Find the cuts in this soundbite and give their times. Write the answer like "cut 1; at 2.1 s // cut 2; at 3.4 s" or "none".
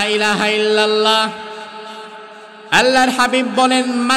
none